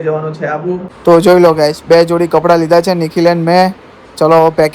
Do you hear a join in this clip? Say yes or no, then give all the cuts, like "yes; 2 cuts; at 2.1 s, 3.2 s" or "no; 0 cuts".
yes; 1 cut; at 0.9 s